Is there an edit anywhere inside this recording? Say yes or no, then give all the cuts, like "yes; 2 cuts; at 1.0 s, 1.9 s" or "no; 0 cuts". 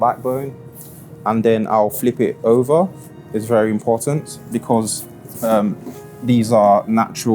no; 0 cuts